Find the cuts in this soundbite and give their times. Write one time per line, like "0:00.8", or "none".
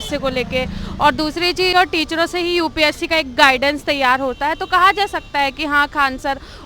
0:01.7